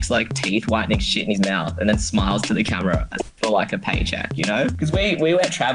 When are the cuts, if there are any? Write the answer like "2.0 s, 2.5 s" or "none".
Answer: 4.7 s